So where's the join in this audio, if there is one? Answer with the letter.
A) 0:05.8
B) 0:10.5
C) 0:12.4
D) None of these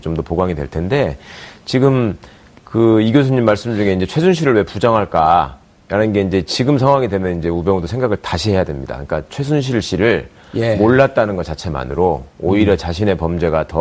A